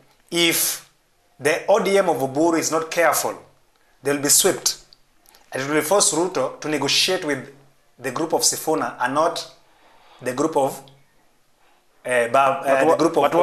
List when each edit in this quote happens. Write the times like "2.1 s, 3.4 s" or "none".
none